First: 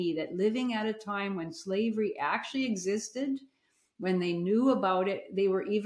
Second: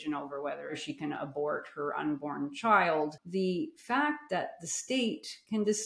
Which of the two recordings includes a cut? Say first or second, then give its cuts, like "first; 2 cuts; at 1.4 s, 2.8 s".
second; 2 cuts; at 0.8 s, 3.2 s